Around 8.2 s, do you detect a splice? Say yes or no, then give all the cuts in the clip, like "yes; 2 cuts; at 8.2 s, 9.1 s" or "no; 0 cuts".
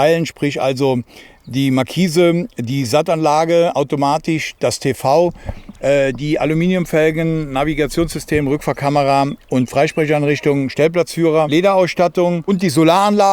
no; 2 cuts; at 11.5 s, 12.5 s